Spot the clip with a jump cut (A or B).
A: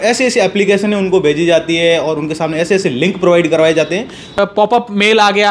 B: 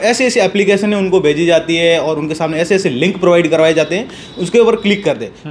A